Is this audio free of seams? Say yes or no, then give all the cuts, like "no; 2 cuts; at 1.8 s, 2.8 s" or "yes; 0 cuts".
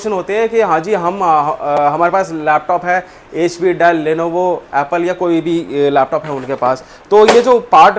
yes; 0 cuts